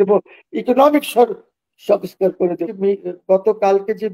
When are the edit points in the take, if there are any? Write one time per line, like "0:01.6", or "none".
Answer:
0:02.7